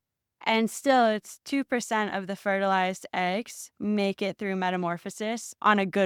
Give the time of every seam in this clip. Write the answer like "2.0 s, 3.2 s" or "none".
none